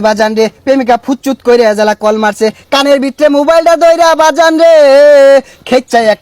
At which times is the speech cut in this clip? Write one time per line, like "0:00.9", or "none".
none